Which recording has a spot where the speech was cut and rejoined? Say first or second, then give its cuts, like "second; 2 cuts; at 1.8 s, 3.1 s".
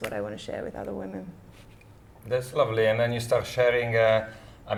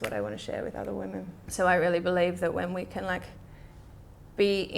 second; 1 cut; at 1.4 s